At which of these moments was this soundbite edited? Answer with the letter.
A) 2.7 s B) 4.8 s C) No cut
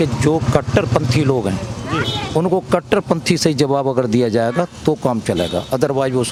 C